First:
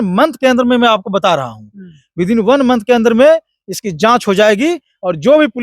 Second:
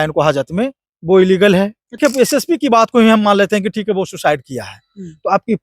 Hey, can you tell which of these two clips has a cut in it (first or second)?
second